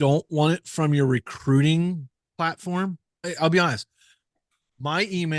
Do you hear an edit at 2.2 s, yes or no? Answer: yes